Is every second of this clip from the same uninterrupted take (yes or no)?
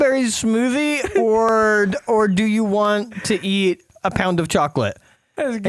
yes